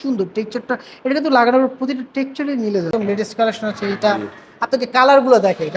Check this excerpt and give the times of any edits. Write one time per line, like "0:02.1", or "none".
0:02.9